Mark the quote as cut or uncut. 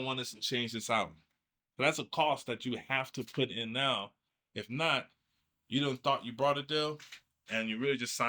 uncut